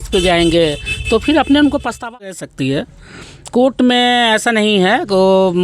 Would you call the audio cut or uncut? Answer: cut